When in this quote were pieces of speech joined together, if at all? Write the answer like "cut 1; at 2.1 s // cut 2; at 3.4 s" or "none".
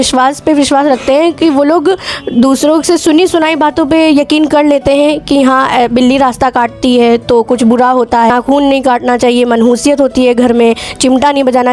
cut 1; at 8.3 s